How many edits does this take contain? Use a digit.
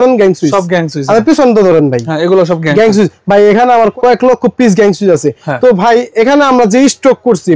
1